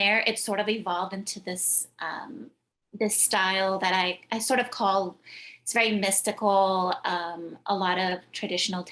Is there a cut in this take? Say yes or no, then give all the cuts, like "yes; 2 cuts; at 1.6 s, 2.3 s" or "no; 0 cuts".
no; 0 cuts